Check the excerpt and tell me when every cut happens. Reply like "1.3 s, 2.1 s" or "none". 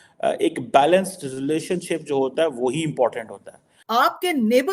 3.7 s